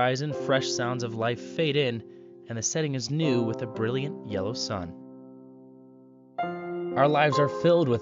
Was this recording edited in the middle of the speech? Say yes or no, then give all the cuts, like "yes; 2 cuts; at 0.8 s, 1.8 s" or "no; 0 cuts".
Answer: no; 0 cuts